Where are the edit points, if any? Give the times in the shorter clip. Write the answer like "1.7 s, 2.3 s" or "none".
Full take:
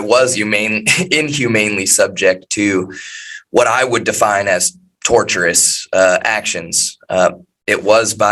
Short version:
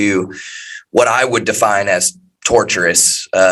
none